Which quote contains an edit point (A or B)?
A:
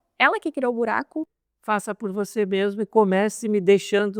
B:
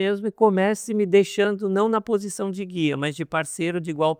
A